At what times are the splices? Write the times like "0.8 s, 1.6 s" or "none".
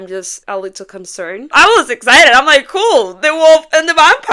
1.5 s